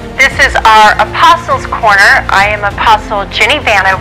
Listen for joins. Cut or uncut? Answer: uncut